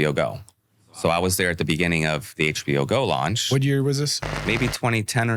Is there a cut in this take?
yes; 1 cut; at 4.4 s

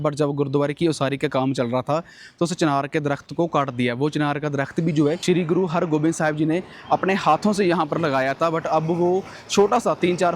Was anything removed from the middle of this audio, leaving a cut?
yes; 1 cut; at 5.2 s

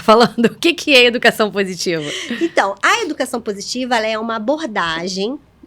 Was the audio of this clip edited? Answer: no; 0 cuts

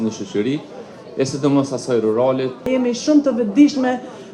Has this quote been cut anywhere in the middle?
yes; 1 cut; at 2.7 s

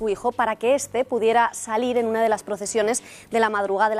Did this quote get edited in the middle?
no; 0 cuts

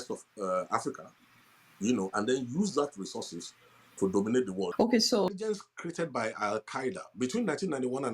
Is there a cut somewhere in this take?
yes; 1 cut; at 5.3 s

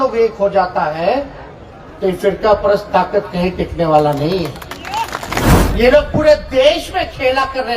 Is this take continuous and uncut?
no; 1 cut; at 5.5 s

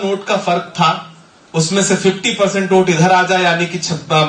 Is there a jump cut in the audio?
no; 0 cuts

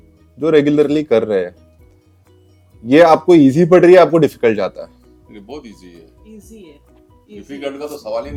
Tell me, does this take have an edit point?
no; 0 cuts

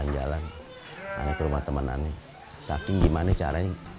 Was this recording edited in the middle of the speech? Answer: no; 0 cuts

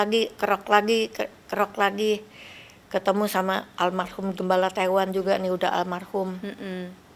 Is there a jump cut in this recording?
no; 0 cuts

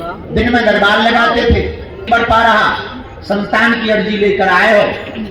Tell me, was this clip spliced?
yes; 1 cut; at 2.1 s

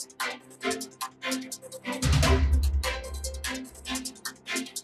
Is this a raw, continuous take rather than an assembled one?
no; 2 cuts; at 1.2 s, 2.1 s

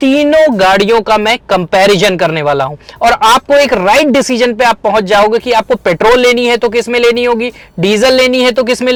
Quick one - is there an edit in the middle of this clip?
no; 0 cuts

